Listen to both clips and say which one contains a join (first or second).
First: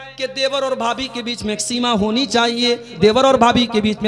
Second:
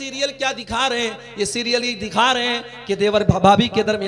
first